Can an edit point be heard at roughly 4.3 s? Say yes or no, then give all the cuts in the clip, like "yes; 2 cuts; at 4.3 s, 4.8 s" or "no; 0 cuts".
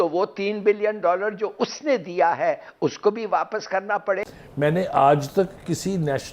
yes; 1 cut; at 4.3 s